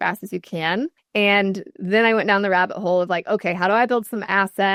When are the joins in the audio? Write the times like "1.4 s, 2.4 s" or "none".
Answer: none